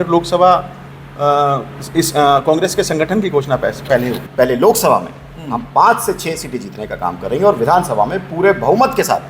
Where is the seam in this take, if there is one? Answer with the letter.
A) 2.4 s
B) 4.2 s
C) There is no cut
B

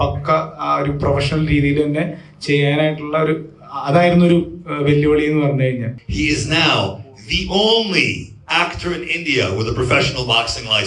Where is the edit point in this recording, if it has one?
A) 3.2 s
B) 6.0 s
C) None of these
B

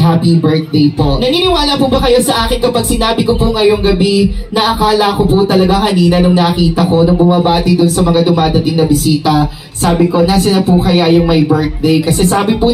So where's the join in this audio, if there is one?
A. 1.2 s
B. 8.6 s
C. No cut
A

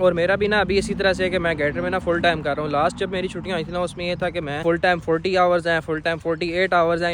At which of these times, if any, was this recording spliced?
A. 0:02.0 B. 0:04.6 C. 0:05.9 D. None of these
B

